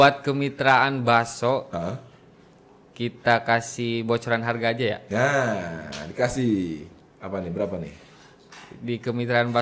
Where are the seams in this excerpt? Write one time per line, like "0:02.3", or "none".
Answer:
none

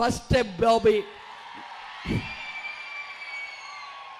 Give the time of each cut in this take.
none

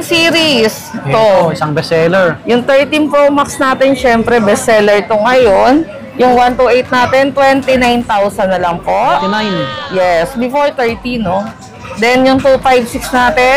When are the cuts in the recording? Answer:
none

